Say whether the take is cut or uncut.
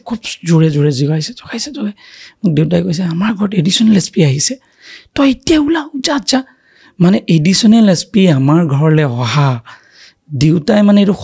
uncut